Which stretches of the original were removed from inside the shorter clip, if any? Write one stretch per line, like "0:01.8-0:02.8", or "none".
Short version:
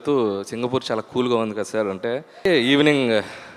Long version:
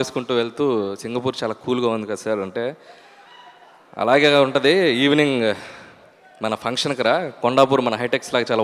0:03.0-0:04.8